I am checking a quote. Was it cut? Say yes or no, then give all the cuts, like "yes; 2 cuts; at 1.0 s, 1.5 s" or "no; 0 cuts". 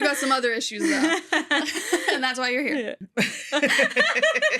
yes; 1 cut; at 3.0 s